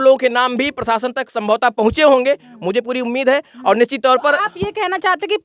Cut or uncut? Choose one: uncut